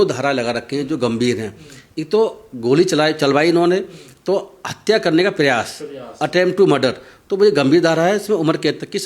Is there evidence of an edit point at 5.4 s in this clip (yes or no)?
no